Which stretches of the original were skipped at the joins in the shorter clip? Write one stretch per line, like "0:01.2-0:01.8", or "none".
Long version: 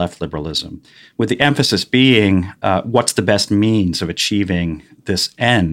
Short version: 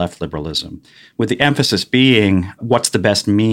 0:02.6-0:02.8